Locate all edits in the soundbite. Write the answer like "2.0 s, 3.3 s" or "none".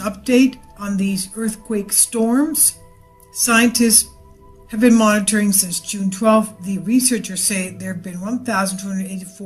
1.3 s